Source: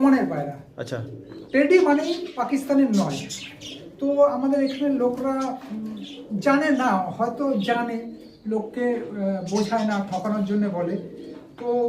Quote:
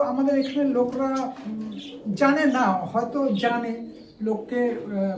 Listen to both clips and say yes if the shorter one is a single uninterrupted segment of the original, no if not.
yes